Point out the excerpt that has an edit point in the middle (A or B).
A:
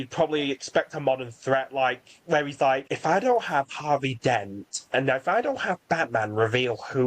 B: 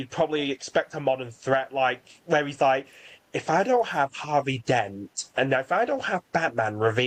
A